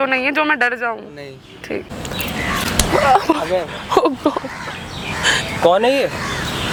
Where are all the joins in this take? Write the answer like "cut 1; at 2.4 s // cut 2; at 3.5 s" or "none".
none